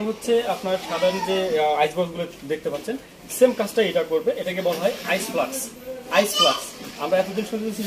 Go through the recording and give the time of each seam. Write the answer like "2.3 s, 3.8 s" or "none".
none